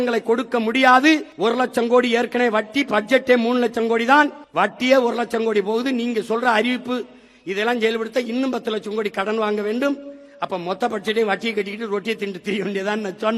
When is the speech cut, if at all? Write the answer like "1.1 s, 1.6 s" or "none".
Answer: 1.3 s, 4.4 s